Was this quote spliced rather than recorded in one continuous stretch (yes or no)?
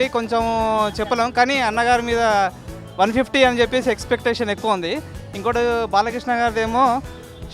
no